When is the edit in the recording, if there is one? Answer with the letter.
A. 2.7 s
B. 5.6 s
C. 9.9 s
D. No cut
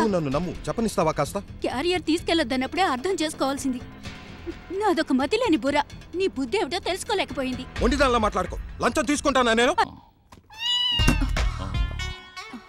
C